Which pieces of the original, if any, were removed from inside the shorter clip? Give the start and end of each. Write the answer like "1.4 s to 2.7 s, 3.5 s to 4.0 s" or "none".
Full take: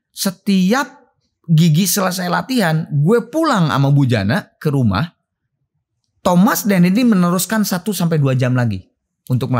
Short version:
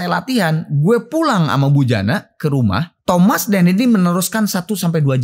5.1 s to 6.1 s